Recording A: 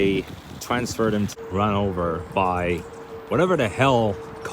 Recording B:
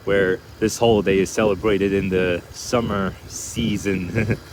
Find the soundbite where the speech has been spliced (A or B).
A